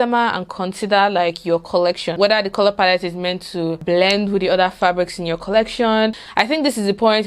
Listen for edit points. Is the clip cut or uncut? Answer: cut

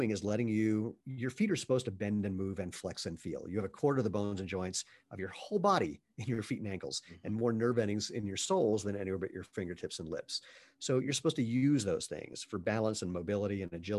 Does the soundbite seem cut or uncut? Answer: cut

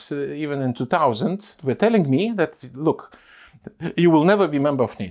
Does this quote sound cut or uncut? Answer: cut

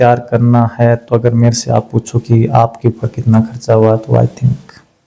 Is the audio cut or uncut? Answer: uncut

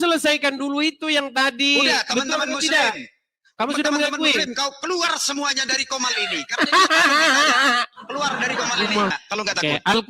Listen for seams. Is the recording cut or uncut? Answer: cut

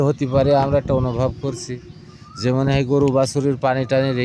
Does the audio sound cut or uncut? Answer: uncut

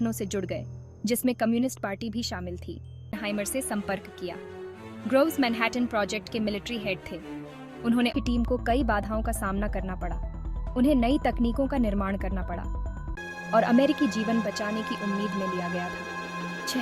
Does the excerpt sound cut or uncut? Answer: cut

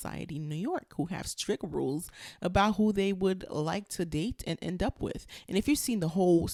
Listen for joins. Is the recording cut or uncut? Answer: uncut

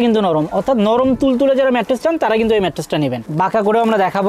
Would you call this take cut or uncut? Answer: cut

